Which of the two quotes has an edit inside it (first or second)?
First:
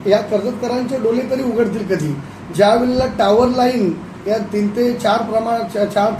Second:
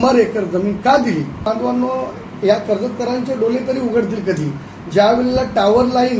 second